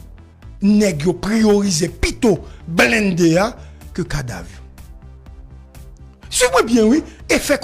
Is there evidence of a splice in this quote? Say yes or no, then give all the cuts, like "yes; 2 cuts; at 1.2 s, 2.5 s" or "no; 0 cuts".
yes; 2 cuts; at 4.5 s, 6.4 s